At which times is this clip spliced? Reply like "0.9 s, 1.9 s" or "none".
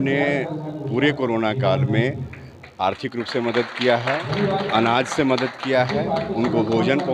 none

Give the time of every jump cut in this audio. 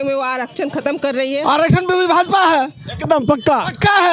1.3 s

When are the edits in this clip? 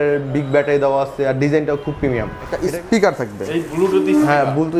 2.5 s

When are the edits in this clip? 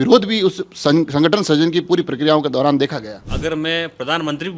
3.3 s

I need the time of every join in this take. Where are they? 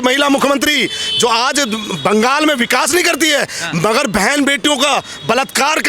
none

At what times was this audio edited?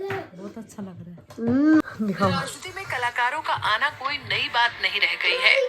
1.8 s

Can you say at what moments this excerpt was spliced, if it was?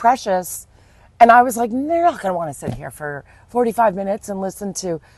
none

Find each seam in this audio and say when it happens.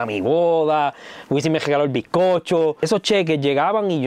2.9 s

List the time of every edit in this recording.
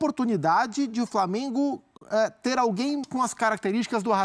3.1 s

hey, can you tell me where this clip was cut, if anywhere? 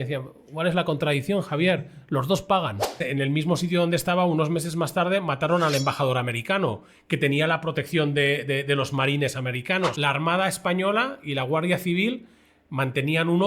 3.0 s, 10.0 s

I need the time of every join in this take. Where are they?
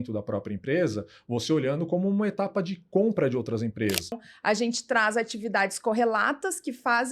4.2 s

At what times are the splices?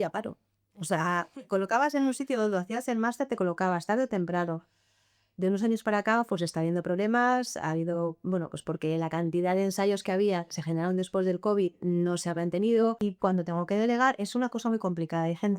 13.0 s

